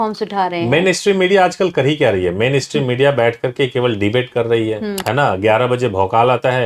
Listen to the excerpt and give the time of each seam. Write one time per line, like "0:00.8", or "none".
0:05.0